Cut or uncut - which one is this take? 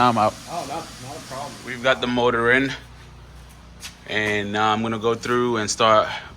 cut